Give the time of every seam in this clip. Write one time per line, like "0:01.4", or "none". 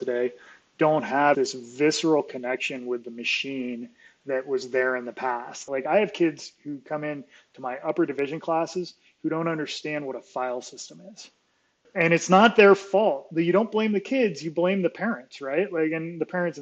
0:01.4
0:05.6
0:11.8